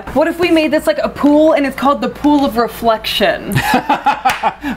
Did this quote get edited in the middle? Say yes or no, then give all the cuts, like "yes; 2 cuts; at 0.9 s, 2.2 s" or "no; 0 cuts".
no; 0 cuts